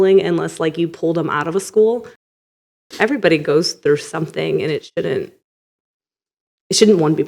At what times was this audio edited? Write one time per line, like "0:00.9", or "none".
0:02.9